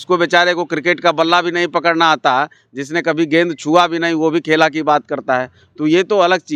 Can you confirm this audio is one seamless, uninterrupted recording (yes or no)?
yes